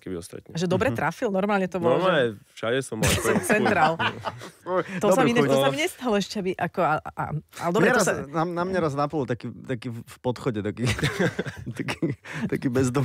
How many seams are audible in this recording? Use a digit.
0